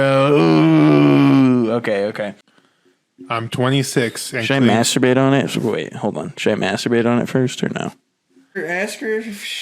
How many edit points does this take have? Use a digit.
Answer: 2